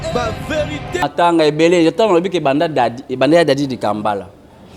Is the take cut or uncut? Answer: uncut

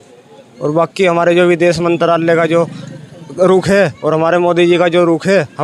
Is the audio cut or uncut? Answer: uncut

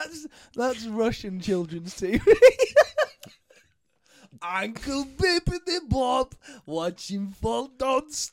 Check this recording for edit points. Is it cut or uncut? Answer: uncut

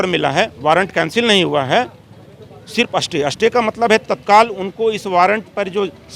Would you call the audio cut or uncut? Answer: uncut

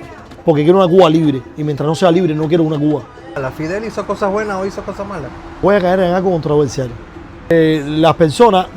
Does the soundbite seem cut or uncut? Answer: cut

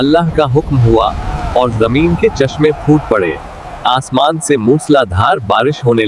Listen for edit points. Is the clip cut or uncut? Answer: uncut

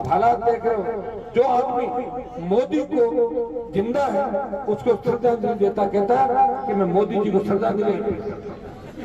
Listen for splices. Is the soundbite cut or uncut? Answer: uncut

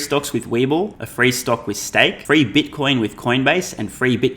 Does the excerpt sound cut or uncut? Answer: cut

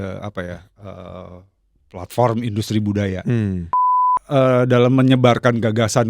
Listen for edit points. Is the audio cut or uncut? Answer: cut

